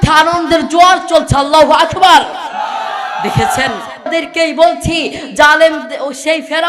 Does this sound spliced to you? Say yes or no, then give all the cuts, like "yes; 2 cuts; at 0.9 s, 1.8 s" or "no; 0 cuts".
yes; 1 cut; at 4.1 s